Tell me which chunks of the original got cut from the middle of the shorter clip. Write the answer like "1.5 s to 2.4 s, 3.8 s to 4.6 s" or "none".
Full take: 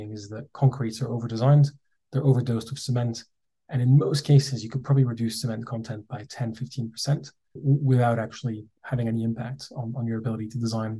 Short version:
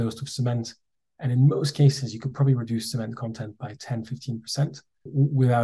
none